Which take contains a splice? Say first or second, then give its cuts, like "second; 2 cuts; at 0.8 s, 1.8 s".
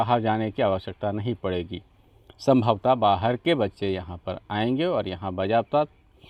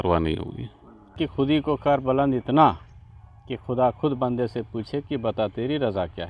second; 1 cut; at 1.1 s